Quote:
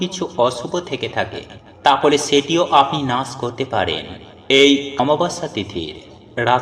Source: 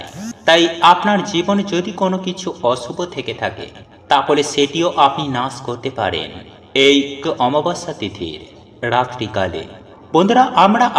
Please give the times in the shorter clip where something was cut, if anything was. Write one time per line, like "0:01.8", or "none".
0:05.0